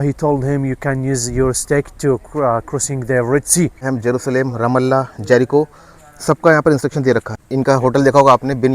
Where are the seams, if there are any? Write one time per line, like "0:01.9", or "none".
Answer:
0:03.8
0:07.3